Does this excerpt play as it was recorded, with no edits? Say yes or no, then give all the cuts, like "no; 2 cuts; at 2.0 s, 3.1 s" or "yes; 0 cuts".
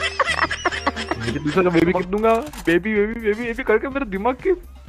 no; 1 cut; at 2.0 s